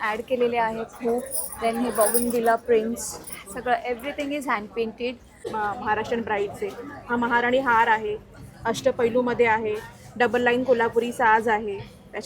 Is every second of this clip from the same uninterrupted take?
no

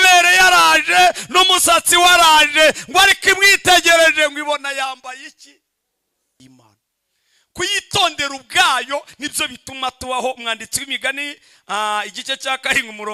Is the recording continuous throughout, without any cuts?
no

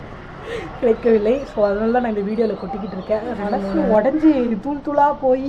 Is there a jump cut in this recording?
yes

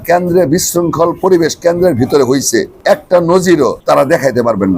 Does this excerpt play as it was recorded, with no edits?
no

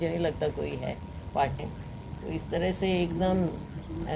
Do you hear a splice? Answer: yes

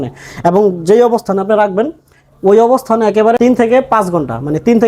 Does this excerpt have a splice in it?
yes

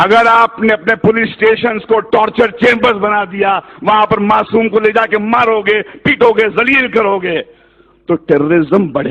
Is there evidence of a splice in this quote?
no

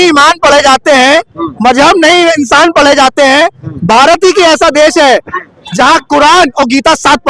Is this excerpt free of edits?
yes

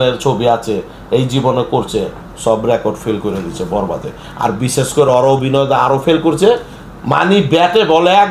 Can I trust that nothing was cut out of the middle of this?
yes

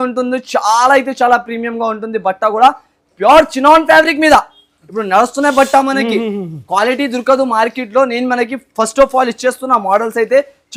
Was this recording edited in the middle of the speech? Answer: no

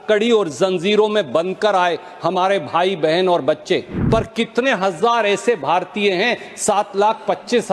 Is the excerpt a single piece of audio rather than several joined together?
no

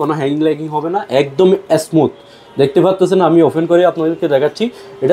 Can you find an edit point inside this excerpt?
no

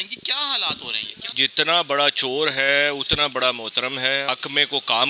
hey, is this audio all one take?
no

